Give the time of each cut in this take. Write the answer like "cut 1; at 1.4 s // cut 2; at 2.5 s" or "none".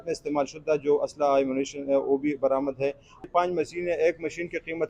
cut 1; at 3.3 s